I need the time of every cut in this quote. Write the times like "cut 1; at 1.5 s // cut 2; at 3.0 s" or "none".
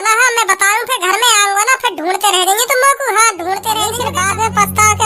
cut 1; at 4.0 s

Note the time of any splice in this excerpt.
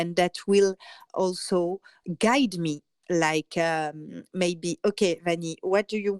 cut 1; at 1.0 s // cut 2; at 2.0 s // cut 3; at 2.9 s

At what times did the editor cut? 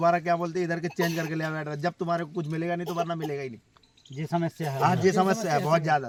none

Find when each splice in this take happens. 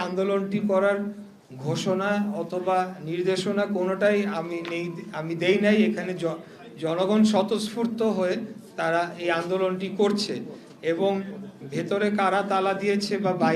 none

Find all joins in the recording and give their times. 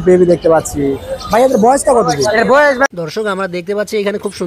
cut 1; at 2.9 s

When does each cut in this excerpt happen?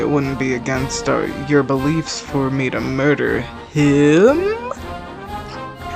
none

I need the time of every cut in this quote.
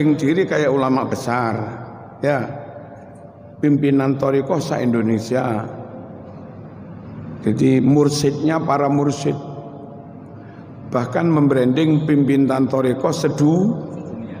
none

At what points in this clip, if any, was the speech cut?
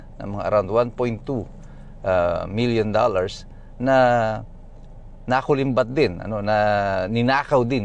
none

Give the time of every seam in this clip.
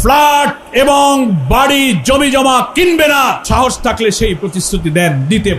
cut 1; at 3.4 s

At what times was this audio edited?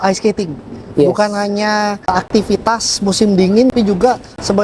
cut 1; at 2.1 s // cut 2; at 3.7 s

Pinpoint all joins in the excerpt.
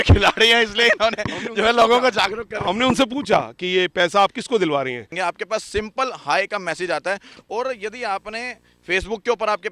cut 1; at 5.1 s

